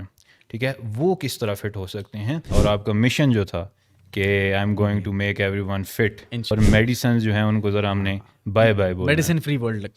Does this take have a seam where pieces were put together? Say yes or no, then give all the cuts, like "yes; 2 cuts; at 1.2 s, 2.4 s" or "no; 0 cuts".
yes; 2 cuts; at 2.5 s, 6.5 s